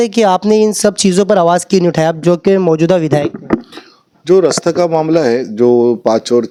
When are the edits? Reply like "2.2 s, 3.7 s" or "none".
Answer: none